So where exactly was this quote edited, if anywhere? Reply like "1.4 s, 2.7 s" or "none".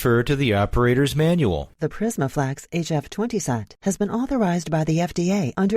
1.7 s